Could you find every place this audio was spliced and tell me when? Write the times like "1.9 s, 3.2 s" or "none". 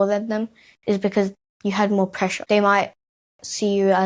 1.5 s, 2.4 s